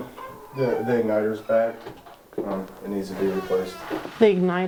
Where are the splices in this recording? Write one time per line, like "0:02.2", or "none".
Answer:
none

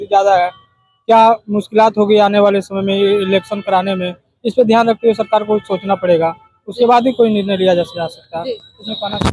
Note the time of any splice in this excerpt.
none

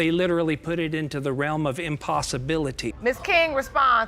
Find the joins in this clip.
0:02.9

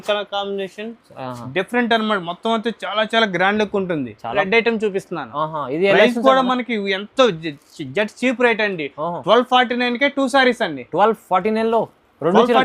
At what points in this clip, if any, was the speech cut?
0:04.4

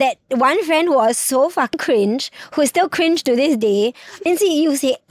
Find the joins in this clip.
0:01.7
0:04.3

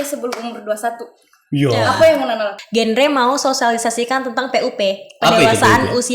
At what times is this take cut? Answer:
0:02.6

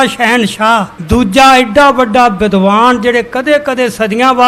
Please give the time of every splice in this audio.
0:00.9

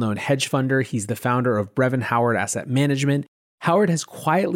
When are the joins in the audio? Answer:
0:03.4

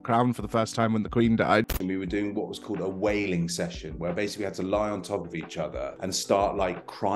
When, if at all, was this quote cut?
0:01.7

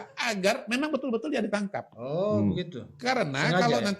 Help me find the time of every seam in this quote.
none

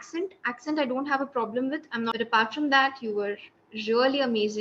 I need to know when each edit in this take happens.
0:02.1

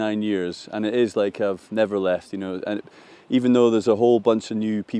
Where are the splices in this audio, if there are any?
none

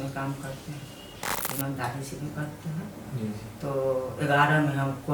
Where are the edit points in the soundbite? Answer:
0:01.4

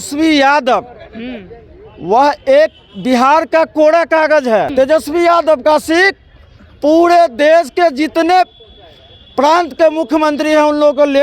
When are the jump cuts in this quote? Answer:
0:04.7

